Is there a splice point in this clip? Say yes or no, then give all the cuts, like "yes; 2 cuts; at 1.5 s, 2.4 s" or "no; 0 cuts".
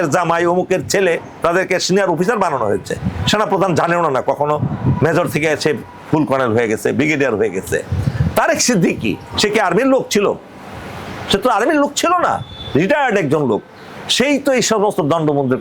no; 0 cuts